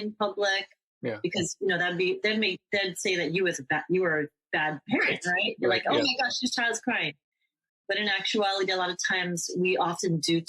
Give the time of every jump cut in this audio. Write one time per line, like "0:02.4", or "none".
none

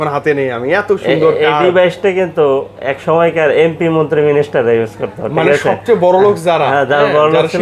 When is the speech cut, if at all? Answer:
none

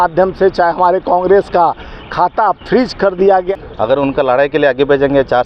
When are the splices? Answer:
0:03.5

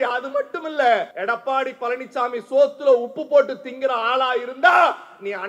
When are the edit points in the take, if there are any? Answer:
0:01.1

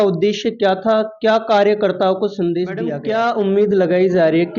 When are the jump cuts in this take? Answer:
0:02.9

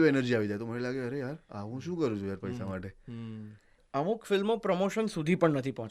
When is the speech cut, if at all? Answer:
0:03.8

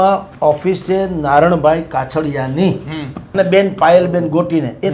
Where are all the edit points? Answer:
0:03.2

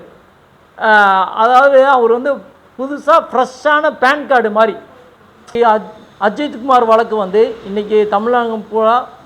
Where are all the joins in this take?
0:05.5

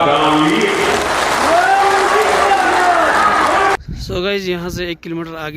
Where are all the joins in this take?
0:01.8
0:03.7

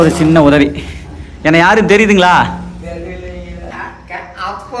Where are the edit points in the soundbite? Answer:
0:03.7

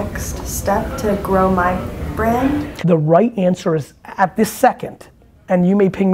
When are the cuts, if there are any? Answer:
0:02.7

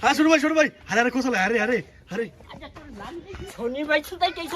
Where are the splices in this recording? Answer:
0:03.5

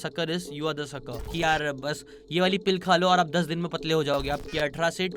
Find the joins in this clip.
0:01.4
0:04.2

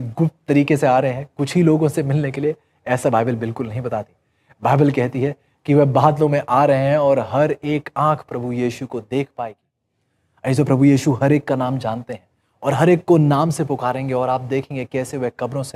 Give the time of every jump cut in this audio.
0:09.8

